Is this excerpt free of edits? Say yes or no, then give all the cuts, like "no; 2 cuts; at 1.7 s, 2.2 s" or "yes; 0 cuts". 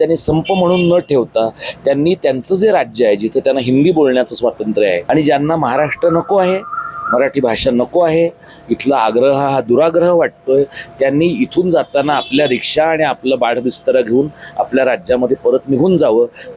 no; 1 cut; at 5.0 s